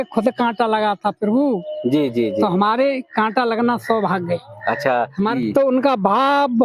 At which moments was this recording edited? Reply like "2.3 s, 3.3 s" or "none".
5.3 s